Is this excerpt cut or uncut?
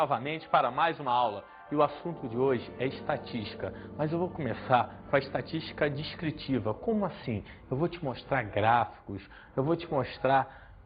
uncut